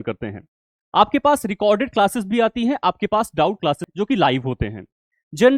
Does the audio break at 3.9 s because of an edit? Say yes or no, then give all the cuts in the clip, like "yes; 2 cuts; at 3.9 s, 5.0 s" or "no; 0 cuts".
yes; 1 cut; at 3.9 s